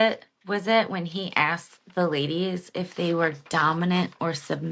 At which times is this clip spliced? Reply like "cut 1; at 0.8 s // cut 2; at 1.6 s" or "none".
none